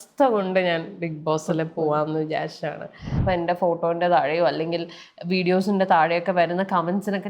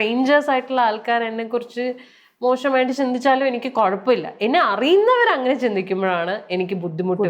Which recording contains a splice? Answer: first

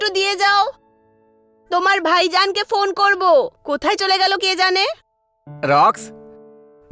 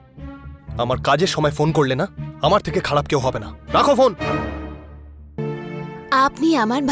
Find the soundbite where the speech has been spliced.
second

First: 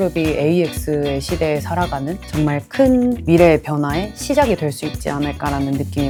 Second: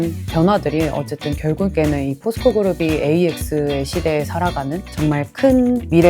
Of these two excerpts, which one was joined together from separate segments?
second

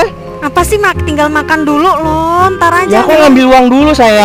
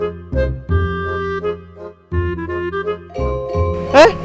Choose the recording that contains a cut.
second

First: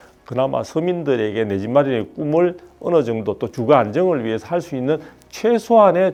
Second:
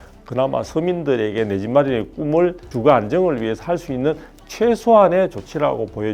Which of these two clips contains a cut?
second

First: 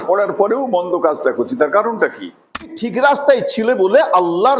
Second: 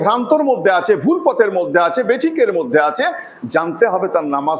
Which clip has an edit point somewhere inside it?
first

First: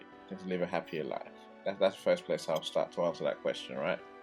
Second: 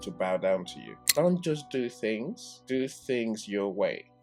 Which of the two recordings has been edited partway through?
second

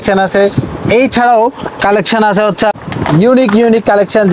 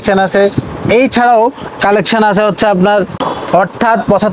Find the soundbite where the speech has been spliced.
second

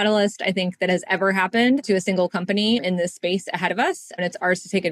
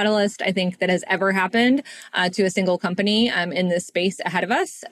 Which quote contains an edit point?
first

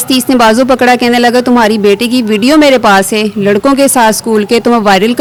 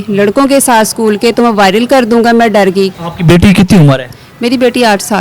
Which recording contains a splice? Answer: second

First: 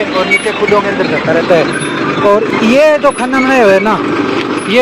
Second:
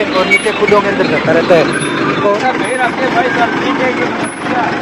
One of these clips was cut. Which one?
second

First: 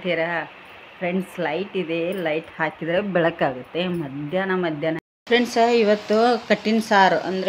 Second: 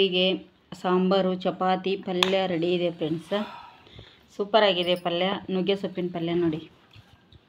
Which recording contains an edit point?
first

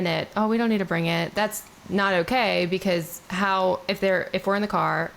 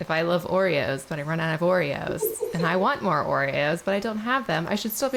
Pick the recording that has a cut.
first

